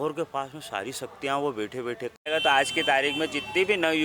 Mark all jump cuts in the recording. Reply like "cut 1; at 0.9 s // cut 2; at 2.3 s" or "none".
cut 1; at 2.2 s